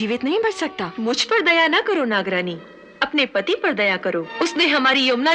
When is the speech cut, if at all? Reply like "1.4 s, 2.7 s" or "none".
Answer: 0.9 s, 4.3 s